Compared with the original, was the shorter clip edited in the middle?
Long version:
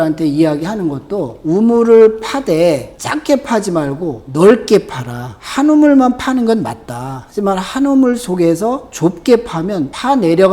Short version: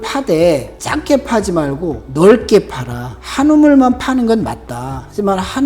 no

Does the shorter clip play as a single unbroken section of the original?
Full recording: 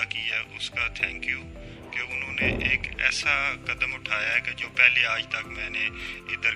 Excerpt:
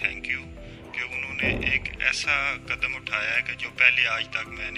yes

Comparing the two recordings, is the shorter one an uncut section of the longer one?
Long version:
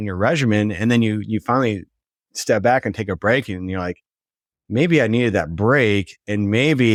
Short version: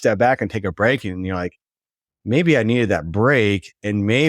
yes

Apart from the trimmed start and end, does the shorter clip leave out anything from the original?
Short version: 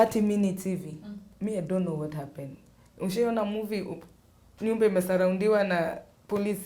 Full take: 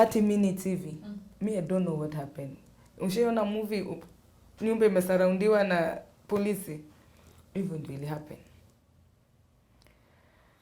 no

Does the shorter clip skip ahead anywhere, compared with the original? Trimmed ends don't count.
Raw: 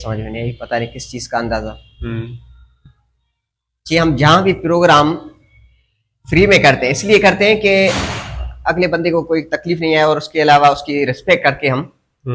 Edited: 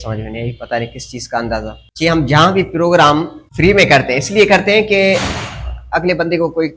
yes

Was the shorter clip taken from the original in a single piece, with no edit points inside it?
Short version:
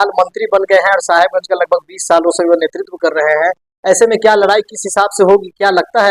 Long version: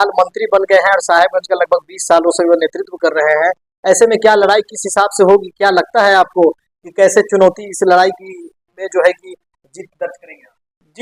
yes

